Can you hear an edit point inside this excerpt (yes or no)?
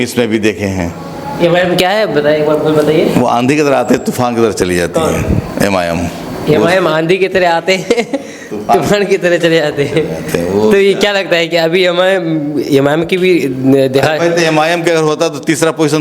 no